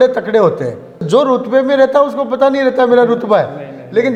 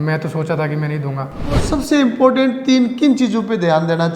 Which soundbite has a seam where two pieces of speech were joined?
second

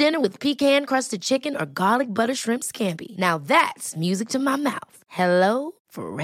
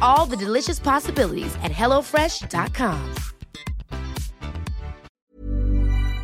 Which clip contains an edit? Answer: second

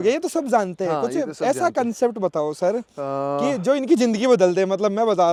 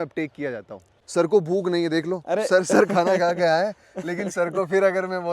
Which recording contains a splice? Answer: second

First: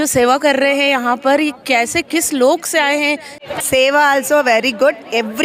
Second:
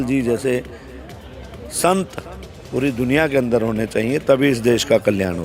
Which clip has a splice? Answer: first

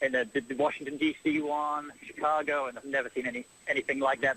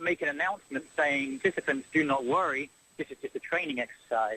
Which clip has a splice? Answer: second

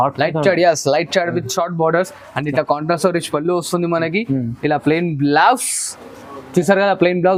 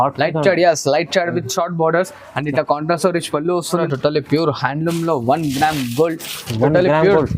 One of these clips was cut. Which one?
second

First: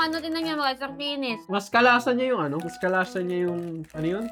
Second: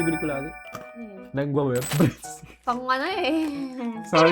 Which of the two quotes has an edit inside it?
second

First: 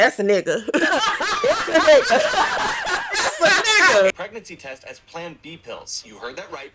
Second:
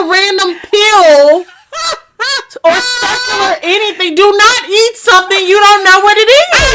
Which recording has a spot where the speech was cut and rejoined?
first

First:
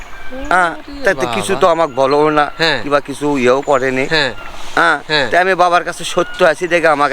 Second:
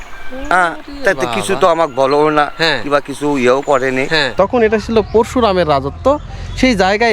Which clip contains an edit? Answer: second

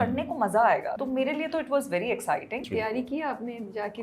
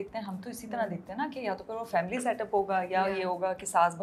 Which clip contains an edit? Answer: first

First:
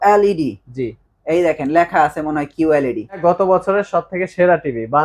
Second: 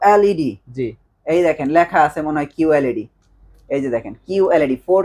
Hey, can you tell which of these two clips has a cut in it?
first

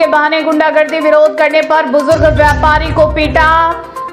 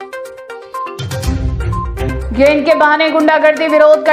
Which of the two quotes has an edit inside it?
second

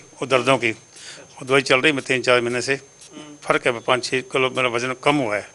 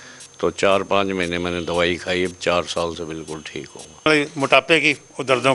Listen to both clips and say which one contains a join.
second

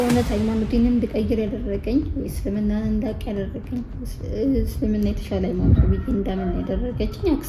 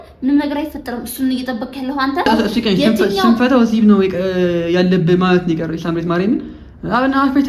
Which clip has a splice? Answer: second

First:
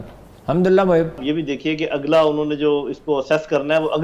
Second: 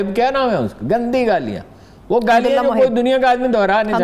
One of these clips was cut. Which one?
first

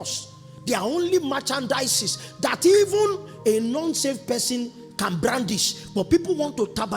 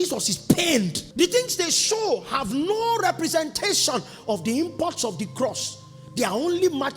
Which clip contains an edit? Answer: second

